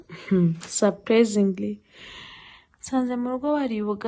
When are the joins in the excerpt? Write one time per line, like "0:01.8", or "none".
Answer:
none